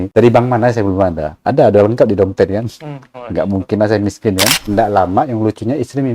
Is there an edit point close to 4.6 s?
yes; 1 cut; at 4.6 s

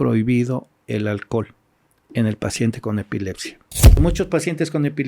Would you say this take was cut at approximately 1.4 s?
no; 1 cut; at 4.0 s

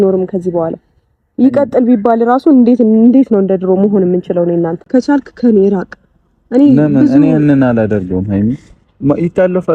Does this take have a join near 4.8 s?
yes; 1 cut; at 4.8 s

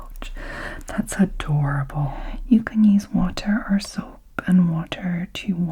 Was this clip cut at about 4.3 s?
no; 1 cut; at 2.3 s

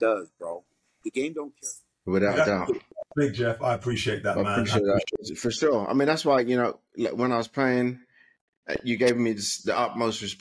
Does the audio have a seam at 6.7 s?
no; 1 cut; at 1.5 s

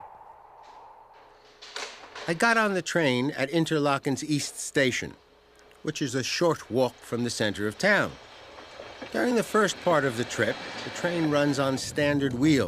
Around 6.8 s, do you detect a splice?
yes; 1 cut; at 6.8 s

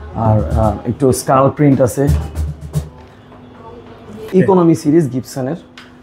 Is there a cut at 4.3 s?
yes; 1 cut; at 4.3 s

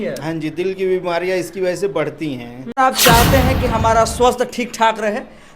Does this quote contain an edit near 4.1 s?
no; 1 cut; at 2.7 s

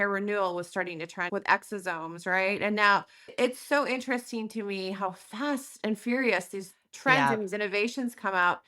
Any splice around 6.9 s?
no; 1 cut; at 3.3 s

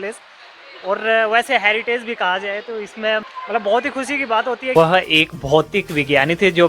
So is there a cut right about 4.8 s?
yes; 1 cut; at 4.8 s

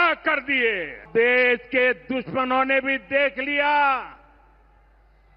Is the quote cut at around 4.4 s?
no; 1 cut; at 1.0 s

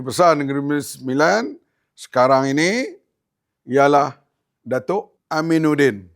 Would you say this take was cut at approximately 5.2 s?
yes; 1 cut; at 5.2 s

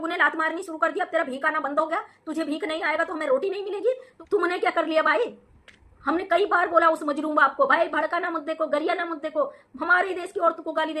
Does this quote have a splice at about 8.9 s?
no; 1 cut; at 4.1 s

